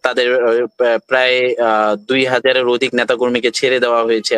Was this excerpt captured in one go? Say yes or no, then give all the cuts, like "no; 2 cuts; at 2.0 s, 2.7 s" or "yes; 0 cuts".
yes; 0 cuts